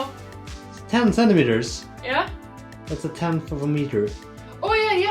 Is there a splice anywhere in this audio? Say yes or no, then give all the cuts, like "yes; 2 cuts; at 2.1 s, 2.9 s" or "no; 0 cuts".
no; 0 cuts